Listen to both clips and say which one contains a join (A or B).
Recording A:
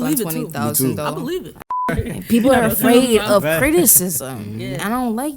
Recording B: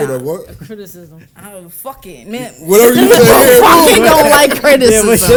A